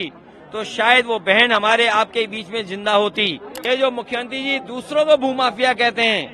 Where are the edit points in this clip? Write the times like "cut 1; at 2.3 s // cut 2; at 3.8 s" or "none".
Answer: cut 1; at 3.5 s